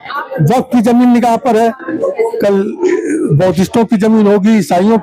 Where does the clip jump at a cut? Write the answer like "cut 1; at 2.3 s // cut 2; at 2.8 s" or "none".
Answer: none